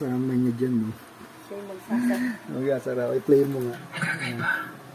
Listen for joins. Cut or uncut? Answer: cut